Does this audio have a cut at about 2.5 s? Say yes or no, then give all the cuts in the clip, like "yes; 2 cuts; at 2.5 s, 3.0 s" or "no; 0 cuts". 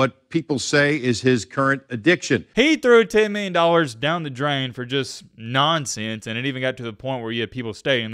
yes; 1 cut; at 2.5 s